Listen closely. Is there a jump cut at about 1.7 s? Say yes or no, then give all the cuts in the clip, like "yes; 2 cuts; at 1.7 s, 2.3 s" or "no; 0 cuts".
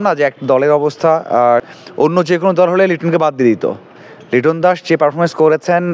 yes; 1 cut; at 1.7 s